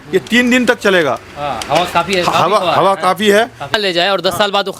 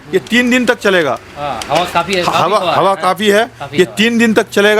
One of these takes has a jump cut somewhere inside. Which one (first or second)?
first